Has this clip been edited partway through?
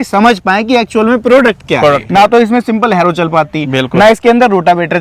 yes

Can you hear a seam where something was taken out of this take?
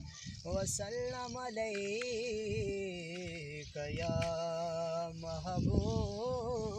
no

